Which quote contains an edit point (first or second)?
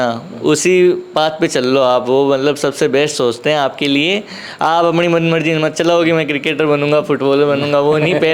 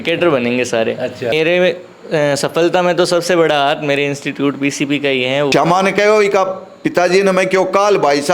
second